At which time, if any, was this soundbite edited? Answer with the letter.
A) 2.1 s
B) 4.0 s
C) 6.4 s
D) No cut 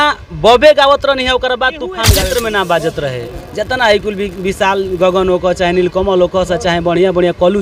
A